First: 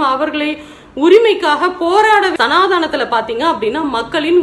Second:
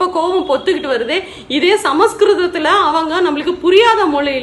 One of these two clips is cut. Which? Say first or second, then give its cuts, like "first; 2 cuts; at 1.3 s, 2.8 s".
first; 1 cut; at 2.3 s